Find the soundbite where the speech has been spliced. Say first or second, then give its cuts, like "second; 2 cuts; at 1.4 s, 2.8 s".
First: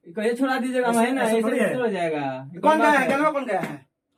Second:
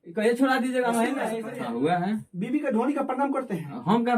second; 1 cut; at 1.3 s